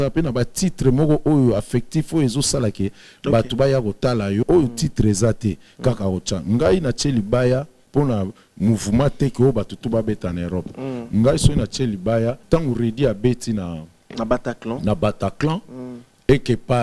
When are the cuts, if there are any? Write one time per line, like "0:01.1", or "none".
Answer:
0:04.4
0:07.8
0:12.4